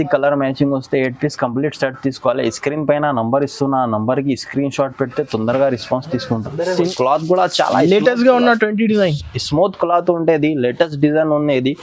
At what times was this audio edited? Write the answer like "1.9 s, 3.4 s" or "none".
6.8 s

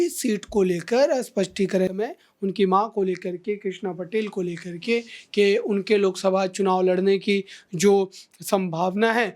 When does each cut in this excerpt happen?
1.9 s

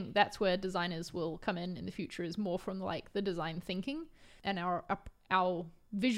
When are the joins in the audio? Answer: 4.3 s

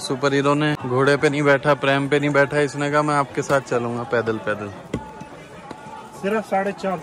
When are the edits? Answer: none

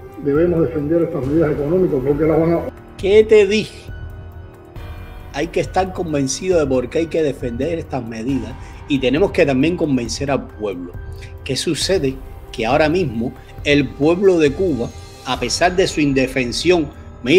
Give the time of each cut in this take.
none

